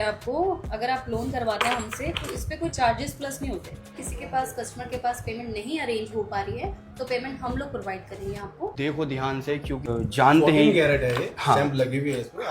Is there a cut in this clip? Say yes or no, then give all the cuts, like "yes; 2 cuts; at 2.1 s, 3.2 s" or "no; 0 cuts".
yes; 3 cuts; at 4.0 s, 8.7 s, 9.9 s